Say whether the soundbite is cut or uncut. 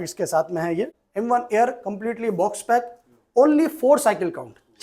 cut